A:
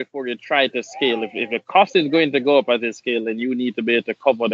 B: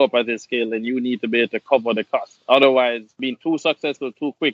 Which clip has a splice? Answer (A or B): B